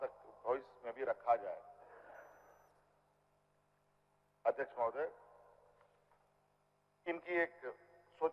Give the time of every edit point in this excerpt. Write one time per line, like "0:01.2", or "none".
0:07.1

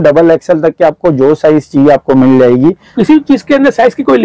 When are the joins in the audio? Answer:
0:02.9

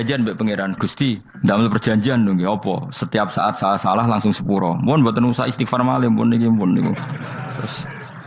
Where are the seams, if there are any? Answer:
0:01.3

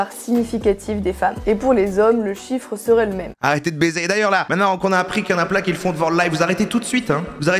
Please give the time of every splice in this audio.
none

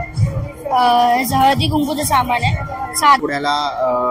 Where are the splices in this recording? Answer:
0:03.2

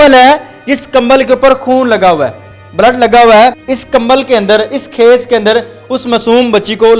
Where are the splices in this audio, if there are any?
0:03.6

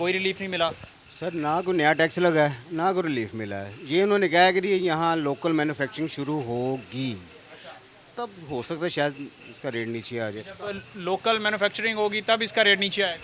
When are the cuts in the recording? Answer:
none

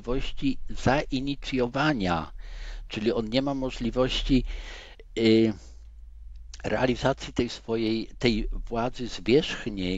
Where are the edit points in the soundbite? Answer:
none

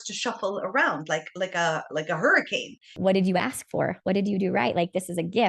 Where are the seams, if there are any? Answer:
0:02.9

